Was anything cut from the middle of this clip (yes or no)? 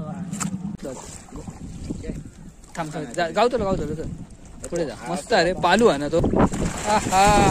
yes